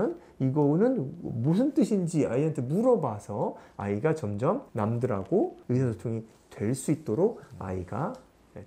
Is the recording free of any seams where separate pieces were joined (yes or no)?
no